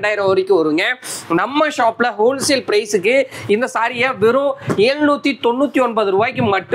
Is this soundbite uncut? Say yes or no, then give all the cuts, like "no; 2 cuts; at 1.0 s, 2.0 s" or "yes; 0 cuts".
yes; 0 cuts